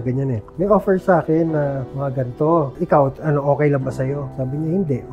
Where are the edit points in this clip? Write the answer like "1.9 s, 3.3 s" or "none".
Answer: 2.7 s, 4.3 s